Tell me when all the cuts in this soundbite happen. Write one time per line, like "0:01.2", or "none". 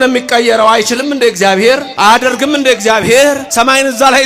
0:01.9
0:03.4

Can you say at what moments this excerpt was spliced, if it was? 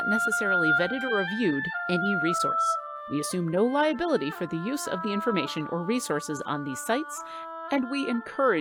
none

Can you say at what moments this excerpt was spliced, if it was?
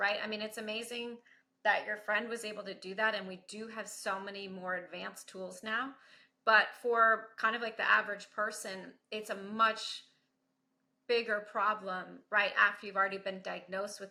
none

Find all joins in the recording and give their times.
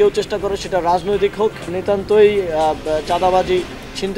0:01.7

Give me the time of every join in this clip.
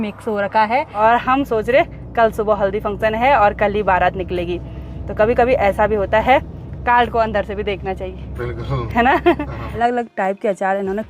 0:01.0
0:09.8

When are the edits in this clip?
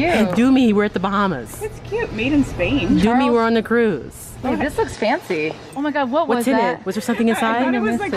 0:05.7

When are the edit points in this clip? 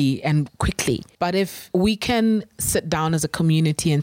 0:01.5

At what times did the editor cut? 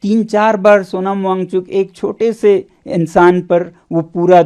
none

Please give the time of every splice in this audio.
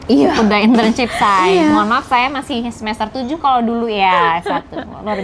none

